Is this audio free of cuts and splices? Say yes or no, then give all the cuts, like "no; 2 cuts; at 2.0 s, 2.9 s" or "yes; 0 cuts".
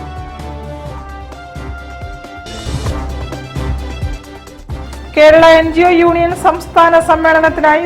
yes; 0 cuts